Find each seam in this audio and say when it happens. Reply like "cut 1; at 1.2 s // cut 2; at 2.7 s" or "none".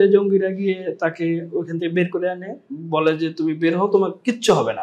none